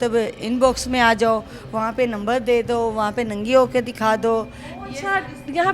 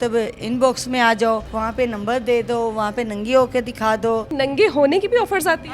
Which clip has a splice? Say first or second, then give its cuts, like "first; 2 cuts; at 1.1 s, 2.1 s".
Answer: second; 2 cuts; at 1.5 s, 4.3 s